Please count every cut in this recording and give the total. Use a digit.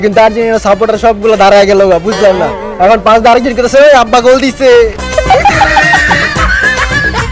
1